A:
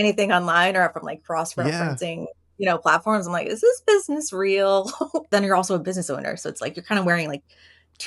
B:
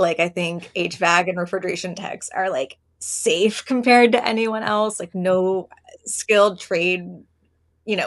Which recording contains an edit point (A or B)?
A